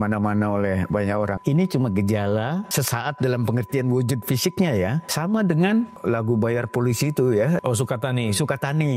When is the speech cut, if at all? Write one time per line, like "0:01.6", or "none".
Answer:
0:01.4
0:02.7
0:05.1
0:05.9
0:07.6